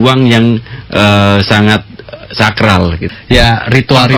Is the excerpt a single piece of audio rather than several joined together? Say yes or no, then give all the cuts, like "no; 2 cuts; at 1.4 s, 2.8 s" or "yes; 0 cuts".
no; 1 cut; at 3.1 s